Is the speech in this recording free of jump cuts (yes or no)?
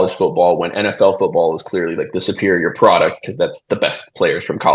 yes